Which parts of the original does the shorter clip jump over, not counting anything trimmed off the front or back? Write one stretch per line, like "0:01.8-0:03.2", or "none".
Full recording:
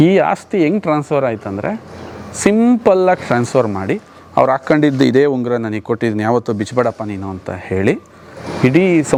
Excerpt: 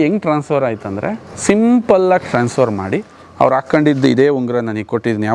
0:01.9-0:02.2